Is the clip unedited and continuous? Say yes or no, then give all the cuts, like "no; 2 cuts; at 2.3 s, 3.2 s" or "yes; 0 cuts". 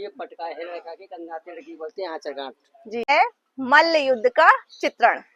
no; 1 cut; at 3.1 s